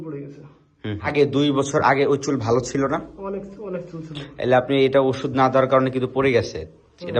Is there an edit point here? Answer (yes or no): yes